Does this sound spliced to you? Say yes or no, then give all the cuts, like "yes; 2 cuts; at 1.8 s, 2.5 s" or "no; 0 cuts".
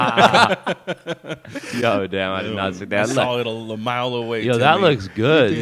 no; 0 cuts